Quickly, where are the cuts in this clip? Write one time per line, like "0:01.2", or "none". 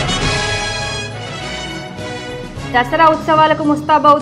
0:01.0